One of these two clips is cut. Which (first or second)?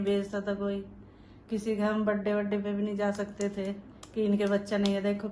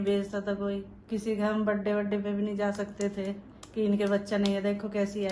second